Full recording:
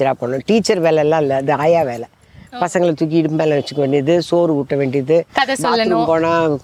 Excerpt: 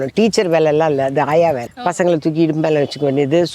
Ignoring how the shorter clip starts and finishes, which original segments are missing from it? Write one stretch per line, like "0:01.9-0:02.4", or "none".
0:02.0-0:02.5